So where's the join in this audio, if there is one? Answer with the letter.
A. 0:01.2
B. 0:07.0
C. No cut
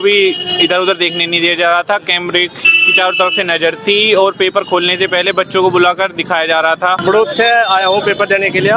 B